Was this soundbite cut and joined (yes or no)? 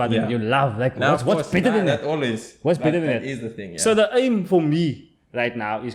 no